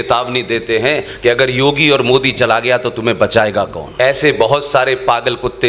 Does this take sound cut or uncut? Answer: cut